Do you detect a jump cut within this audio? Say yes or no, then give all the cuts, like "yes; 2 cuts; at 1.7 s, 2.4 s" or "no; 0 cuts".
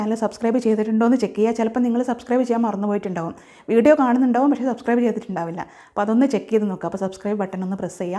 no; 0 cuts